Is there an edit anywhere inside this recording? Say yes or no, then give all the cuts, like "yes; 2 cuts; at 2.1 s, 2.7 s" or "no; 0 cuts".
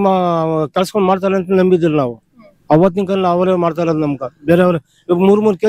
no; 0 cuts